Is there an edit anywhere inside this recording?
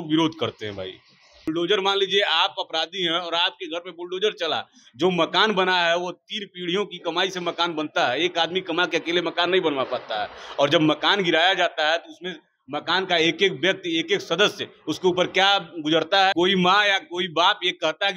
yes; 2 cuts; at 1.5 s, 16.3 s

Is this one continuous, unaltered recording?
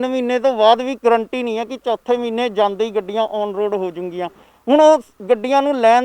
no; 1 cut; at 4.4 s

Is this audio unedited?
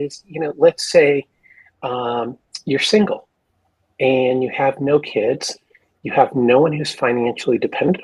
yes; 0 cuts

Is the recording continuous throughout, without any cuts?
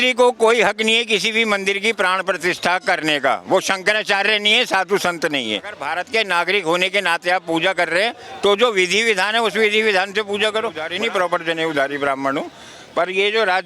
no; 2 cuts; at 5.8 s, 10.8 s

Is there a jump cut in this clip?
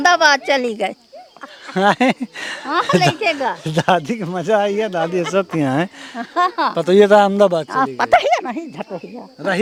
no; 0 cuts

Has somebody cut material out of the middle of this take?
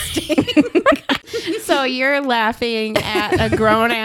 yes; 1 cut; at 1.3 s

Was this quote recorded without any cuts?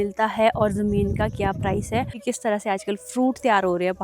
no; 1 cut; at 2.1 s

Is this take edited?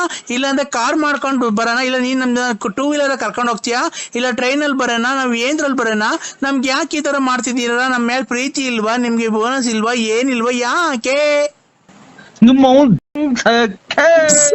no; 0 cuts

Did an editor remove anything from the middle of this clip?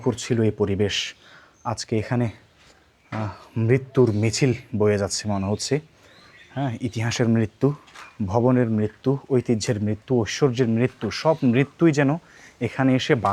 no; 0 cuts

